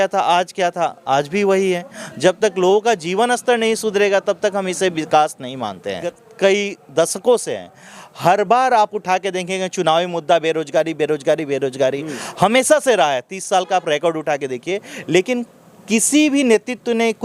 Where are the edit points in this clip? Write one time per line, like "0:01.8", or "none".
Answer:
0:06.2